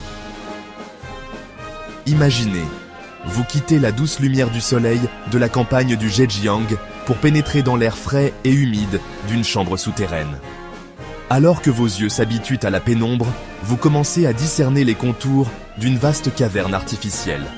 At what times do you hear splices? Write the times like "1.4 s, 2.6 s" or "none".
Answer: 2.0 s